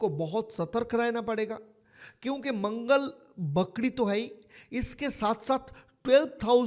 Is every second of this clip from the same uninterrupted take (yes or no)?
yes